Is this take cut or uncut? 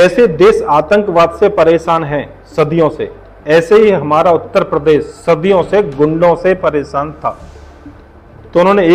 uncut